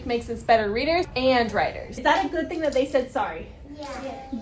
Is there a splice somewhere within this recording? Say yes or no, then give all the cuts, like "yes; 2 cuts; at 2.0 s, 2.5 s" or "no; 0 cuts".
yes; 1 cut; at 1.9 s